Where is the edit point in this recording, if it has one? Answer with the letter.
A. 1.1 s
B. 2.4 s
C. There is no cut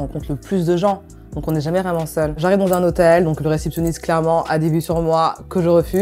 B